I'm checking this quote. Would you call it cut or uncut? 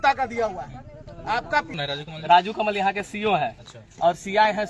cut